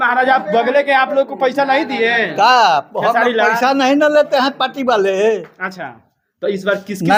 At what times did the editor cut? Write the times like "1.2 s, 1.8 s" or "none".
none